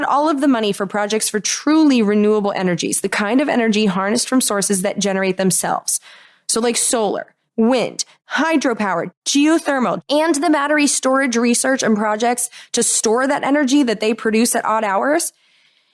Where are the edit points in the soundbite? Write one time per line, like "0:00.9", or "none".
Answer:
0:07.4
0:08.1
0:09.1
0:10.0